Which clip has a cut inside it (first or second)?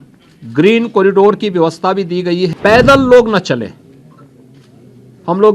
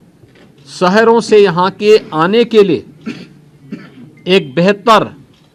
first